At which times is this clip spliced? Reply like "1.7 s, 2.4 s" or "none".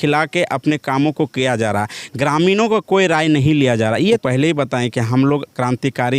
4.2 s